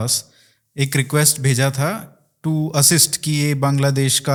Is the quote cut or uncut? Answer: uncut